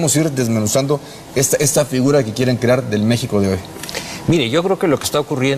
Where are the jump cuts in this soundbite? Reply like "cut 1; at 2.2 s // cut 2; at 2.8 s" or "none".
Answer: cut 1; at 4.6 s